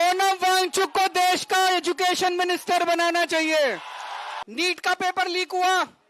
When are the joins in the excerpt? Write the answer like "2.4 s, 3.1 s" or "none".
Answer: 4.4 s